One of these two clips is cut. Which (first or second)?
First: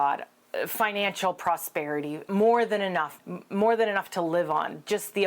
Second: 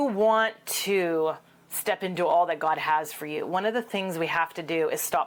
first